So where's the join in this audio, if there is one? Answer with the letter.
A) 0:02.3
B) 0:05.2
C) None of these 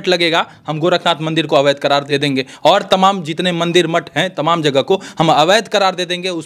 A